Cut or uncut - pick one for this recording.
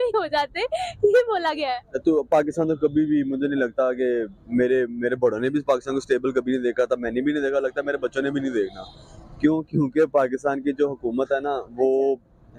uncut